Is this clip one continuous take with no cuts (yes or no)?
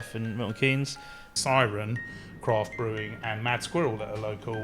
no